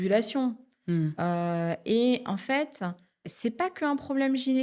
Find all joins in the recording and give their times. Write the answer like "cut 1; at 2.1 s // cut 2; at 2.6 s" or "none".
cut 1; at 3.2 s